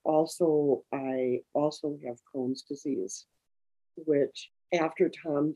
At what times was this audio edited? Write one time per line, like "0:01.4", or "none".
0:04.5